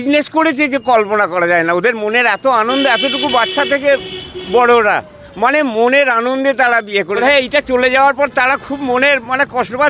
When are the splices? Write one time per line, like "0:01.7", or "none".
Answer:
0:07.2